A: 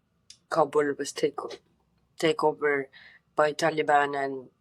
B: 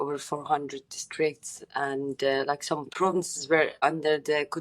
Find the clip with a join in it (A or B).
B